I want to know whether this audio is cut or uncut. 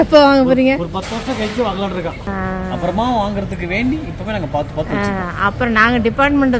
cut